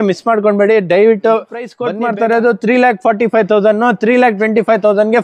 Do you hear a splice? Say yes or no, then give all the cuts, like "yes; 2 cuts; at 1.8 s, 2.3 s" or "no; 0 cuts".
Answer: yes; 1 cut; at 1.8 s